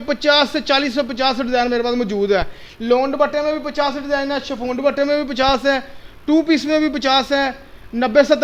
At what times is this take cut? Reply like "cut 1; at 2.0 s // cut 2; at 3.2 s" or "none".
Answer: none